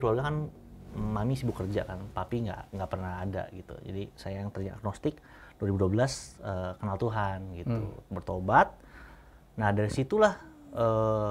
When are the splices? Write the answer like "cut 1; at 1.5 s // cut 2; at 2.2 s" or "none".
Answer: none

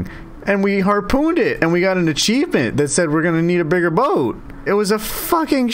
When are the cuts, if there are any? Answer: cut 1; at 4.6 s

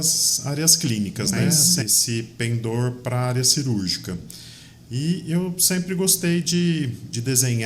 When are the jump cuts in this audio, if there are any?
cut 1; at 1.8 s

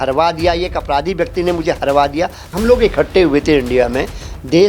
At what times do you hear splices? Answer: cut 1; at 2.4 s

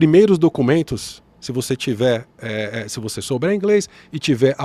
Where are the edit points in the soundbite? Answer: none

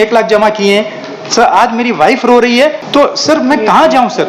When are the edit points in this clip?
cut 1; at 2.8 s

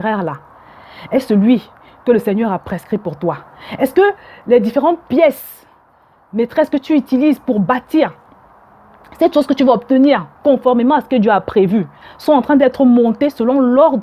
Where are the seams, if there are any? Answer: cut 1; at 12.0 s

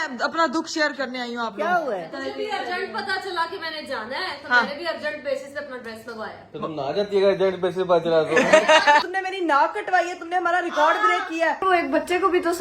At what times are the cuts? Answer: cut 1; at 2.1 s // cut 2; at 9.0 s // cut 3; at 11.6 s

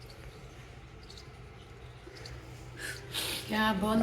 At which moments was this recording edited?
cut 1; at 2.1 s

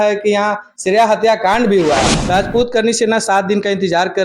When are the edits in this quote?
cut 1; at 2.2 s

